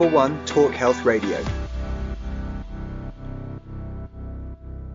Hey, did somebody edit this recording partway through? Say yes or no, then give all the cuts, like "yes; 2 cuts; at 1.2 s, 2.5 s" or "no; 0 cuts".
yes; 1 cut; at 1.4 s